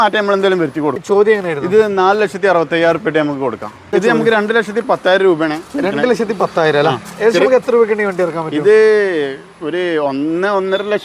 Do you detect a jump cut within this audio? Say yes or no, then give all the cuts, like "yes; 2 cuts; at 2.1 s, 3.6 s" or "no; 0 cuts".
yes; 2 cuts; at 1.0 s, 3.8 s